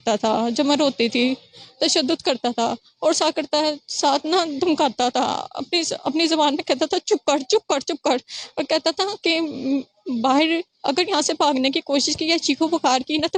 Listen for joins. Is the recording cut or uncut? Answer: uncut